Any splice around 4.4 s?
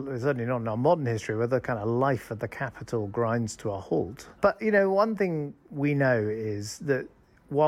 yes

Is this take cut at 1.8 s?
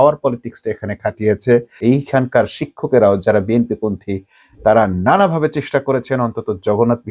yes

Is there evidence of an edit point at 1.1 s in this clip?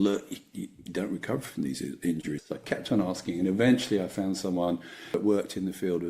no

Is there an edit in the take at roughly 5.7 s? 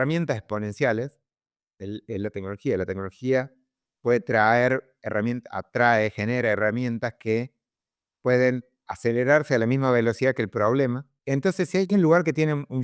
no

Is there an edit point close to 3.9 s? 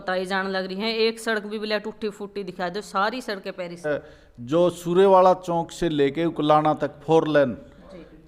yes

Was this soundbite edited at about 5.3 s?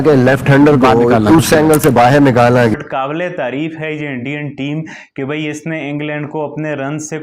no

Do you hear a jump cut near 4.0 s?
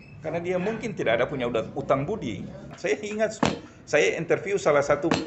no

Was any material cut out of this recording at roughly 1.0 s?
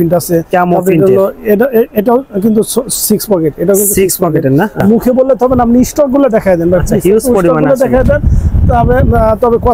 no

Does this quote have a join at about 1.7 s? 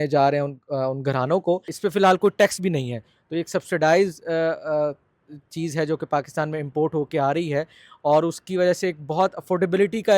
yes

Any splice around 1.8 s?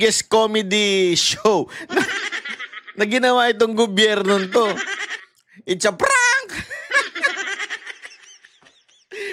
no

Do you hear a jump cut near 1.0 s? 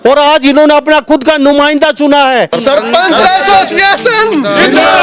no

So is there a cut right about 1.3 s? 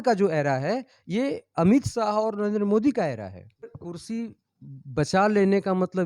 no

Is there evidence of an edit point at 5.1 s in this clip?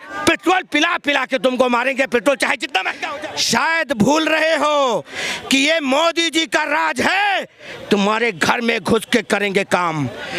no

